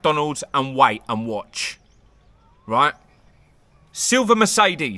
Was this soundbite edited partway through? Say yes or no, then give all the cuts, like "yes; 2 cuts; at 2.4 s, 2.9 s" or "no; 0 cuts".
no; 0 cuts